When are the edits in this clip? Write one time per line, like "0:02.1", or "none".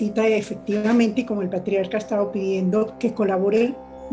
0:02.9